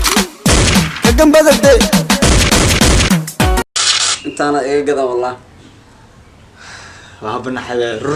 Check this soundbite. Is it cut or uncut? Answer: cut